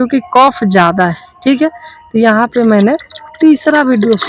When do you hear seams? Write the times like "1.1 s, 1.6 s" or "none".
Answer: none